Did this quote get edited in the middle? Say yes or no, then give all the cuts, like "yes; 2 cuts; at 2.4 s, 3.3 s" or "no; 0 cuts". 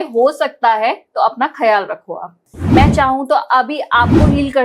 yes; 1 cut; at 2.4 s